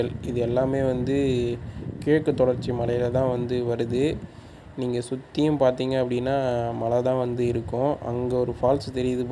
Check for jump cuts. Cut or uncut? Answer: uncut